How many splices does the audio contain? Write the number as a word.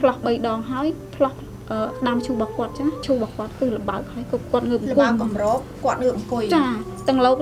one